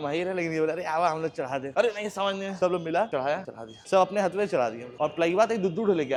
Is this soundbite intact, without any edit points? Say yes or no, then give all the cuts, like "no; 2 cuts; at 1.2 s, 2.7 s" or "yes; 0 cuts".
yes; 0 cuts